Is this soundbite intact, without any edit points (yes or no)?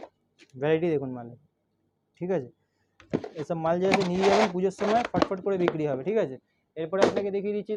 yes